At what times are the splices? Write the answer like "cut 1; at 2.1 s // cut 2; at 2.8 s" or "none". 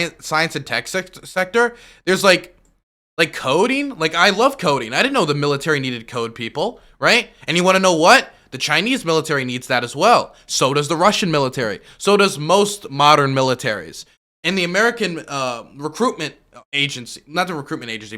none